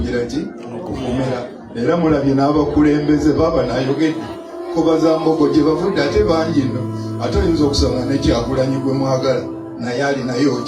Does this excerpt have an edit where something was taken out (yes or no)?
yes